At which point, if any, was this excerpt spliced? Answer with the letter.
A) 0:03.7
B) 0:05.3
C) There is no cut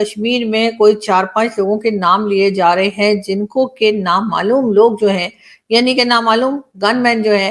C